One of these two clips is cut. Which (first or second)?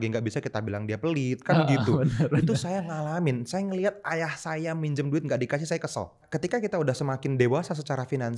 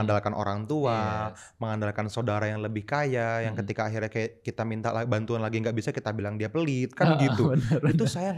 first